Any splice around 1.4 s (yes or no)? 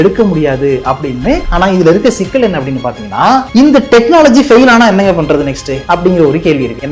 yes